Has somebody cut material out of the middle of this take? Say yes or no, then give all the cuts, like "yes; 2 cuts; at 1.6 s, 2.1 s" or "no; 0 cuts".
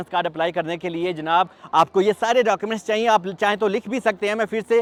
no; 0 cuts